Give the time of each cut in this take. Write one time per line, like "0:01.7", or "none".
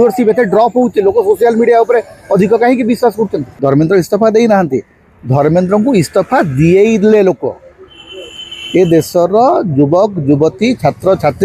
0:03.4